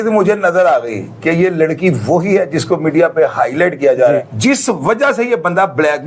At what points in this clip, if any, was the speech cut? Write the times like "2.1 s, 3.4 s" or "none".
4.3 s